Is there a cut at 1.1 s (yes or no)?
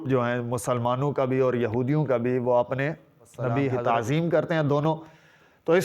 no